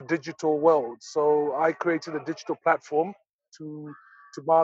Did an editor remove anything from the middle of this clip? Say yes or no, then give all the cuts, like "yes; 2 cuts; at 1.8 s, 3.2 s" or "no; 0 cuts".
yes; 1 cut; at 3.5 s